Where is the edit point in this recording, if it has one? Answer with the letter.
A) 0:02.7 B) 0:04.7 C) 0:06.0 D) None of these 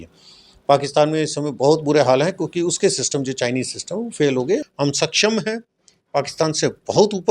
B